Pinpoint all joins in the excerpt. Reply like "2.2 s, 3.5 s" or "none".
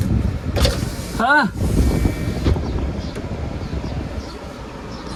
none